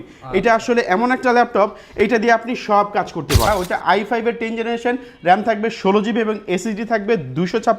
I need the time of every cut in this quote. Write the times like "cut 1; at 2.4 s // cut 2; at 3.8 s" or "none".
cut 1; at 3.5 s